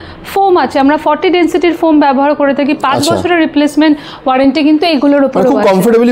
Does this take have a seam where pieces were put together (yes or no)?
no